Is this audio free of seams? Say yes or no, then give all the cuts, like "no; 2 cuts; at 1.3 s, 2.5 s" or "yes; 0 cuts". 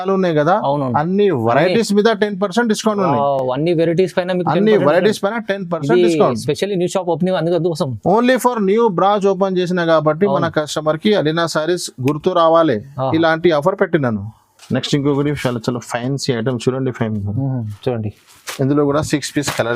yes; 0 cuts